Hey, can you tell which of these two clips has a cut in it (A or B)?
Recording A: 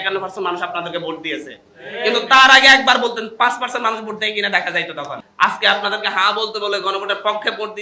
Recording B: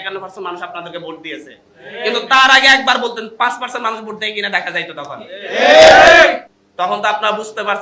A